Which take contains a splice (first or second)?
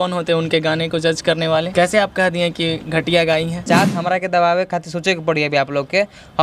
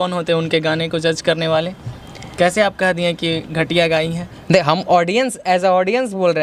first